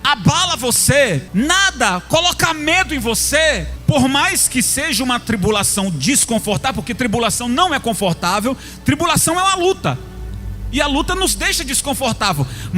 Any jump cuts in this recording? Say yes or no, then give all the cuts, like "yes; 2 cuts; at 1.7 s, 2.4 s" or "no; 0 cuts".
yes; 2 cuts; at 1.2 s, 3.7 s